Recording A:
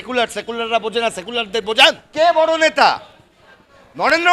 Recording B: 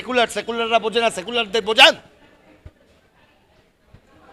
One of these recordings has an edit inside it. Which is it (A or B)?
A